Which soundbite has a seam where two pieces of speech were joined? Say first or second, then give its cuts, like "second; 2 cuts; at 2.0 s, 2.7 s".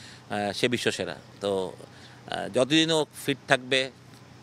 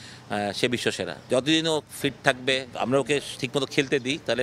second; 2 cuts; at 1.2 s, 2.7 s